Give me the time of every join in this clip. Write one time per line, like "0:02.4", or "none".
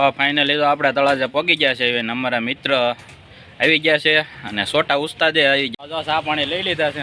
0:05.7